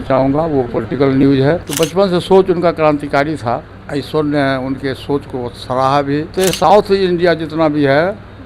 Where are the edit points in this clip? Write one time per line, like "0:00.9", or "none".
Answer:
0:01.7
0:06.3